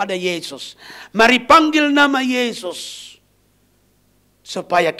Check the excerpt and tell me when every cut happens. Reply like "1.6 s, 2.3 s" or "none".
none